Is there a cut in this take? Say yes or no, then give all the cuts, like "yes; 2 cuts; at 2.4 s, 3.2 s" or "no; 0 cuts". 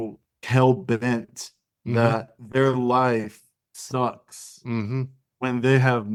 no; 0 cuts